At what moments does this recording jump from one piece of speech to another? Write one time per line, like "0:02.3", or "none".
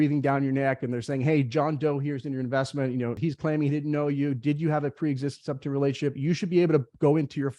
0:03.2